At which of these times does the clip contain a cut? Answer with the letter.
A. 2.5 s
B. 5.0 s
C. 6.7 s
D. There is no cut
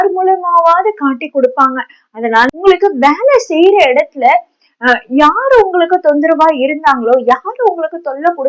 A